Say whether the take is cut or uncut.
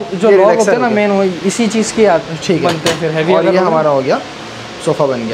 uncut